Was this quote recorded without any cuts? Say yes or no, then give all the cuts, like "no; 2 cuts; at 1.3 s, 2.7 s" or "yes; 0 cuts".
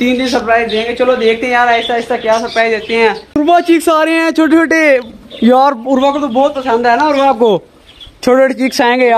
no; 1 cut; at 3.4 s